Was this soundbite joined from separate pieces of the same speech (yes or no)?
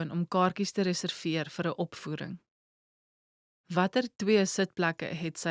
no